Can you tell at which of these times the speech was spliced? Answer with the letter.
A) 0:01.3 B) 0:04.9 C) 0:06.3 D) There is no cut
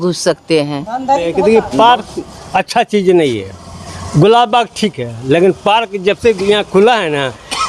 A